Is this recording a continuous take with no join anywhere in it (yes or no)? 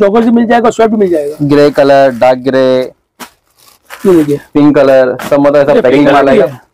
yes